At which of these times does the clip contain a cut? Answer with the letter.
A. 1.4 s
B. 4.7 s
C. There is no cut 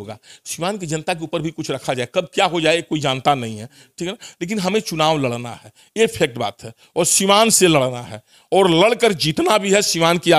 C